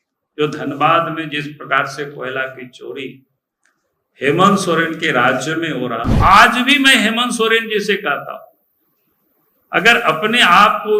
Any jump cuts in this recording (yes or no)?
yes